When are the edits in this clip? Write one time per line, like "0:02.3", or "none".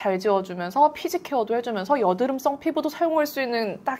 none